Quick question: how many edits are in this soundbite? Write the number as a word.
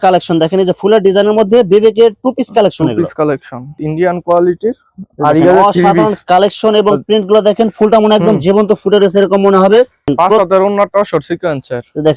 two